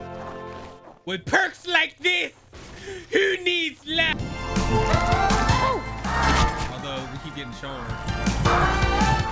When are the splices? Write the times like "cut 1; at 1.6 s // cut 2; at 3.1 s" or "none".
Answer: cut 1; at 4.4 s